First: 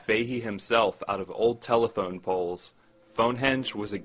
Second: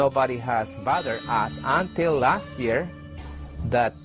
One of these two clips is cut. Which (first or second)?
first